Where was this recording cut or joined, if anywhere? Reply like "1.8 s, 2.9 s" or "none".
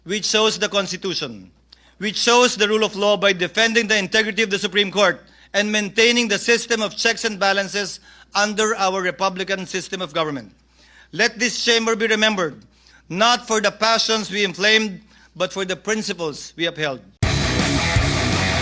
17.1 s